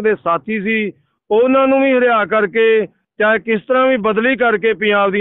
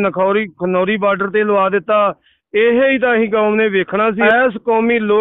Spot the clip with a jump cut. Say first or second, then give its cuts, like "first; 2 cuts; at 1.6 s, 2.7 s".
second; 1 cut; at 4.2 s